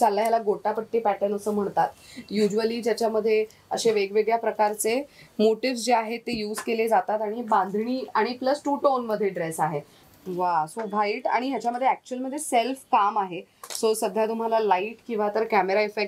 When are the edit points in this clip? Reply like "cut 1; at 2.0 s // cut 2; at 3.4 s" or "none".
cut 1; at 9.9 s